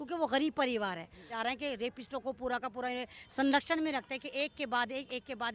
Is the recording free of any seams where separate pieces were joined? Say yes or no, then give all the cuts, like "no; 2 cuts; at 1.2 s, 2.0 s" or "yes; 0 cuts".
no; 1 cut; at 1.3 s